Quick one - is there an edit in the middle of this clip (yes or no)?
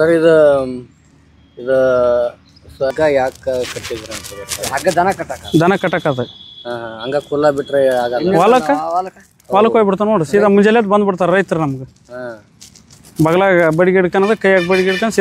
yes